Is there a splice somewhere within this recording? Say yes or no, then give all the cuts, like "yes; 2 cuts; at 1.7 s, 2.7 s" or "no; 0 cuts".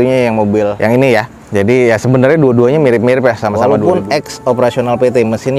yes; 1 cut; at 3.6 s